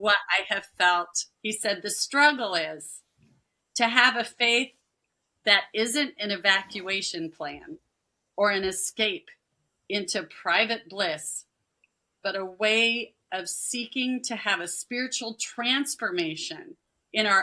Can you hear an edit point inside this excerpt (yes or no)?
yes